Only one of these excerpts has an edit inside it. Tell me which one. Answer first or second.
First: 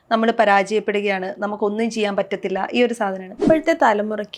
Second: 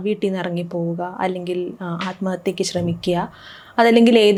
first